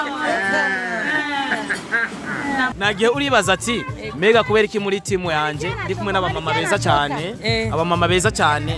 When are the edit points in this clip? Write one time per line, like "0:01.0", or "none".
0:02.8